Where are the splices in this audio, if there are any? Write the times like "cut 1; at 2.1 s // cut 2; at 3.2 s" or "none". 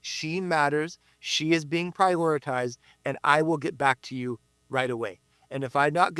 none